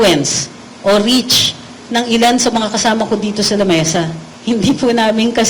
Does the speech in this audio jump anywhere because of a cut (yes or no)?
yes